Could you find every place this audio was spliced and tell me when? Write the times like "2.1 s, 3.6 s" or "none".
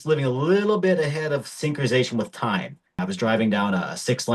3.0 s